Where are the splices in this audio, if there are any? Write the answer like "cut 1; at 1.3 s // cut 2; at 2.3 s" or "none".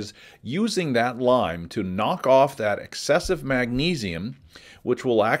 none